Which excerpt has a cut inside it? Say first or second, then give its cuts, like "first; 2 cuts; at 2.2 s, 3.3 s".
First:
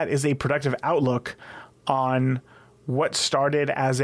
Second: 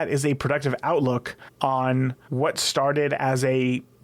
second; 2 cuts; at 1.4 s, 2.2 s